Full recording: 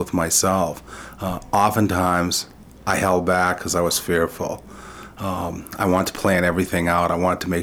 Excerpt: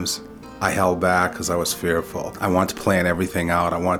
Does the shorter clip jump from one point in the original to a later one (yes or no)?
yes